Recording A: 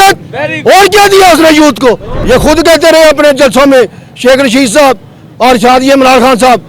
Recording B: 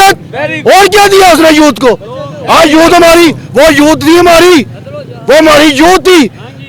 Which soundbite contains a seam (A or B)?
A